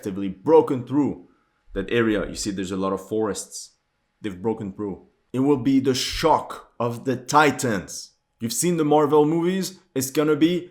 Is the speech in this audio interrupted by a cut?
yes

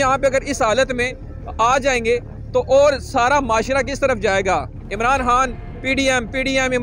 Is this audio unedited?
yes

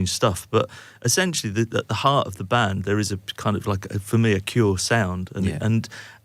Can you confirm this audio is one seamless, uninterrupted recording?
yes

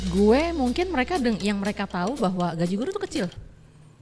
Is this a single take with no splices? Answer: yes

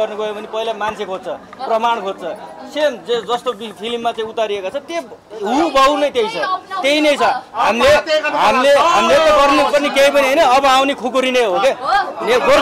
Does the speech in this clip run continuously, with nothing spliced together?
yes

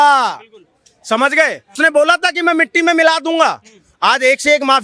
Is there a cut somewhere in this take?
yes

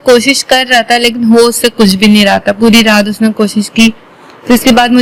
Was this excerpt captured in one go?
yes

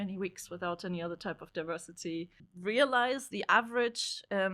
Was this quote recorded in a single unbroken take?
no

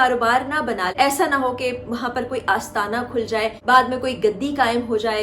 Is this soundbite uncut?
no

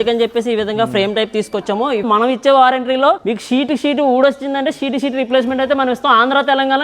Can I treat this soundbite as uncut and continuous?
no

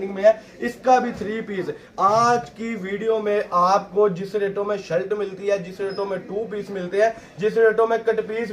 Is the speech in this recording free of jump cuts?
yes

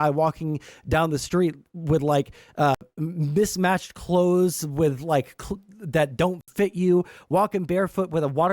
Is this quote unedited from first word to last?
no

